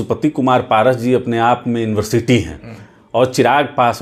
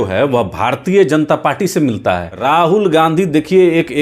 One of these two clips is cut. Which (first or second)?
second